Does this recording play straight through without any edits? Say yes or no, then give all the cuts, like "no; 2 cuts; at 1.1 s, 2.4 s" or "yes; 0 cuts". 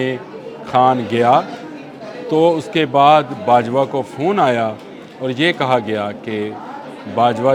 yes; 0 cuts